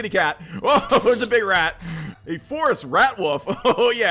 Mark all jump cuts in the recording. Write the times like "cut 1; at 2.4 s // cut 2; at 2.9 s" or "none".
cut 1; at 2.0 s